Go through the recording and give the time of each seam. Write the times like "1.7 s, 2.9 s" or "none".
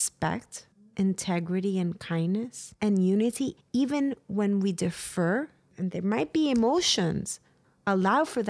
2.6 s